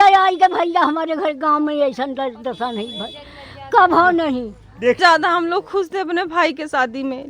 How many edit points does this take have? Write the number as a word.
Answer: one